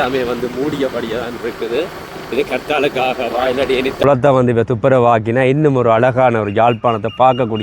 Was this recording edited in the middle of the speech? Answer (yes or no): yes